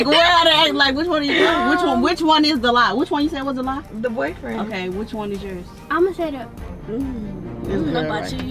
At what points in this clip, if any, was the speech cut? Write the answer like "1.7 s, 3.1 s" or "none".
none